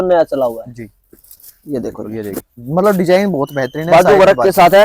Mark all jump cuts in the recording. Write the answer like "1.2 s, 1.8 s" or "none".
2.5 s